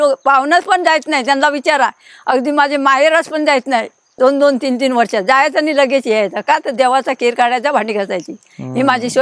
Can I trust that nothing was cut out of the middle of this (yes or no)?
yes